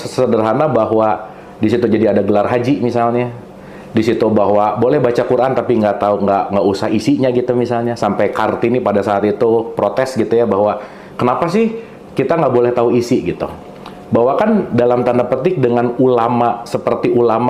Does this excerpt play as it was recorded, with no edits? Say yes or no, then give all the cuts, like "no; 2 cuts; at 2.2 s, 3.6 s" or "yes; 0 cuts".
yes; 0 cuts